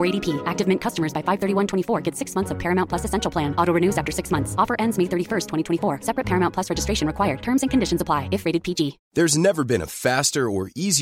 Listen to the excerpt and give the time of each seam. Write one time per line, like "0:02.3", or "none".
0:09.0

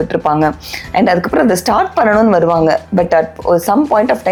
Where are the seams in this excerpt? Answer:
none

